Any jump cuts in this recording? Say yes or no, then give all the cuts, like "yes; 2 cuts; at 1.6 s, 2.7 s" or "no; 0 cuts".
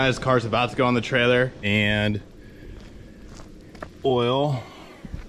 yes; 1 cut; at 1.6 s